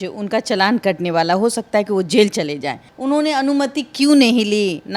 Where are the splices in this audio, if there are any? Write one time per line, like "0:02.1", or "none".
0:02.9